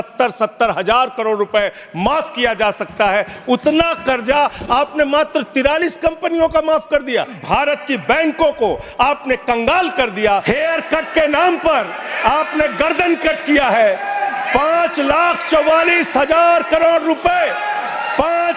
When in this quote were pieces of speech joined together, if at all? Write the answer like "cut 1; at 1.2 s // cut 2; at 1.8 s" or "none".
cut 1; at 7.3 s // cut 2; at 10.4 s

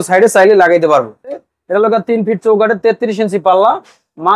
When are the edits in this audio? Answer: cut 1; at 1.5 s

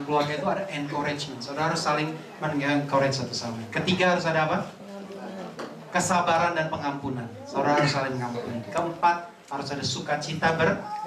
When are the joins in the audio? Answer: none

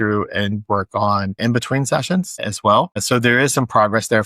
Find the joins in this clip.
cut 1; at 1.4 s // cut 2; at 3.0 s

